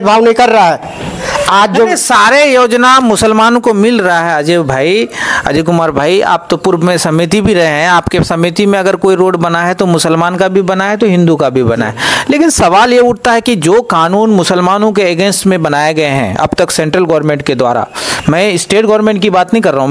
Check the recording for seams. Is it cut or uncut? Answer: uncut